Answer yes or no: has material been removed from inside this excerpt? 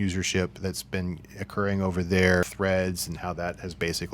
yes